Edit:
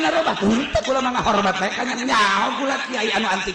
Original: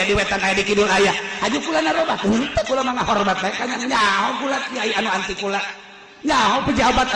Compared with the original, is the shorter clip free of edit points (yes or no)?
yes